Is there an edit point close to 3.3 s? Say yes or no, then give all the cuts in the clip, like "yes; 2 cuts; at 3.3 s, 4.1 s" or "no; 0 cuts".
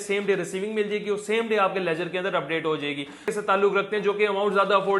yes; 1 cut; at 3.3 s